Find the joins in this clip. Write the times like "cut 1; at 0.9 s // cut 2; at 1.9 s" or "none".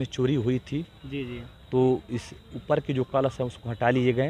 none